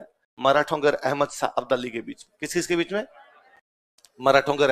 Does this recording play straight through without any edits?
yes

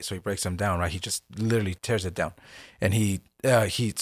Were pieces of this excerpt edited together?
no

